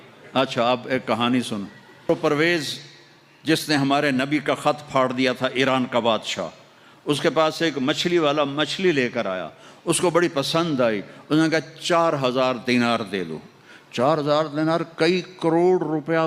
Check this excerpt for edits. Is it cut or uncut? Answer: cut